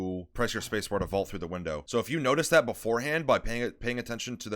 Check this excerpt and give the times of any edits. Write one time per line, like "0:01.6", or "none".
0:01.8